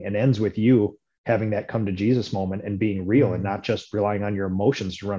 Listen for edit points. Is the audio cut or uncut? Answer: uncut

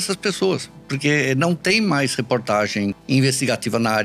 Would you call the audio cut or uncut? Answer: cut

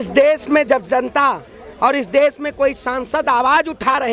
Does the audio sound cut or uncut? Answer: uncut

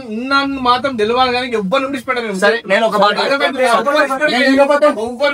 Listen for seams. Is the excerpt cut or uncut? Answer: uncut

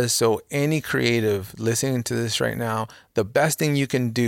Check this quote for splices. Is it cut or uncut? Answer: uncut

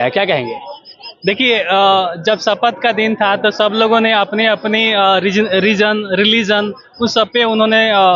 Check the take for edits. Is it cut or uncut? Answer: uncut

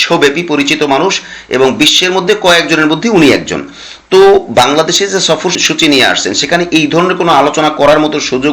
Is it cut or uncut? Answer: uncut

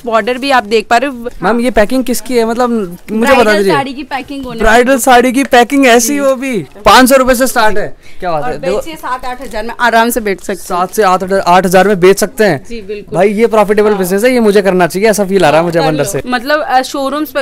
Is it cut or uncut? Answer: cut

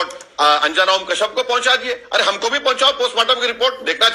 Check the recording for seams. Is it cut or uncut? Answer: uncut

